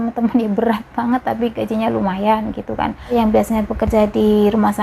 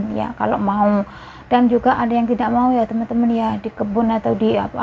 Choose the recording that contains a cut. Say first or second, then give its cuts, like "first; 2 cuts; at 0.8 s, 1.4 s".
first; 1 cut; at 3.1 s